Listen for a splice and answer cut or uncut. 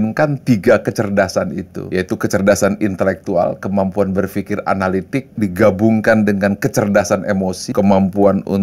cut